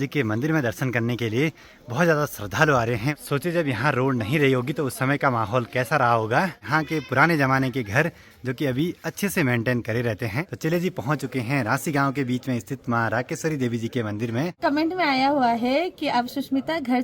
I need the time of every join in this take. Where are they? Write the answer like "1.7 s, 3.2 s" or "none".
3.2 s, 6.6 s, 10.4 s, 14.5 s